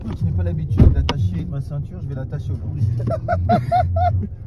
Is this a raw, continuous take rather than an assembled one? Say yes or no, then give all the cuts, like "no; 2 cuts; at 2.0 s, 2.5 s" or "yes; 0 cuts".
yes; 0 cuts